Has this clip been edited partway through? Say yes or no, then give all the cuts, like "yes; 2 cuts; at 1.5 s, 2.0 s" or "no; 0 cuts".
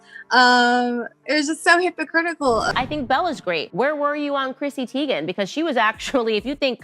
yes; 1 cut; at 2.7 s